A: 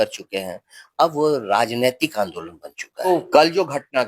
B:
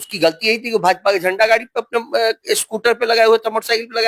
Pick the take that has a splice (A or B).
A